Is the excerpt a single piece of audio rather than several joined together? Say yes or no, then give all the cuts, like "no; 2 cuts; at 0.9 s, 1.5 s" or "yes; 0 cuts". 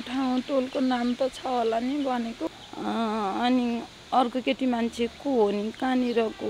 no; 1 cut; at 2.6 s